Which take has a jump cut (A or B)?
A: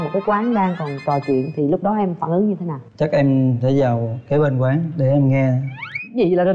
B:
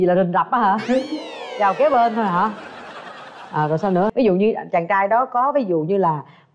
B